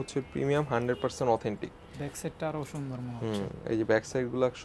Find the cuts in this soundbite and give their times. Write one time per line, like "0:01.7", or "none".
none